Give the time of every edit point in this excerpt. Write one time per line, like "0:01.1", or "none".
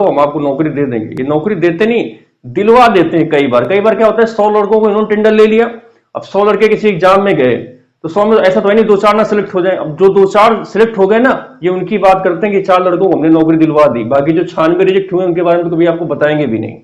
none